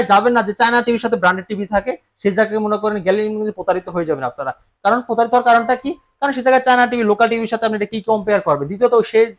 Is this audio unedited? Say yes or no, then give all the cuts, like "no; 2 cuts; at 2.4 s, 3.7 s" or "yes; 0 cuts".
yes; 0 cuts